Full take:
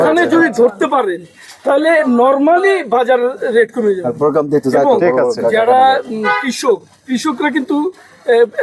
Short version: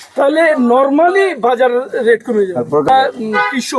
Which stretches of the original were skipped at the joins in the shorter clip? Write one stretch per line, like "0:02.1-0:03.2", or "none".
0:04.4-0:05.8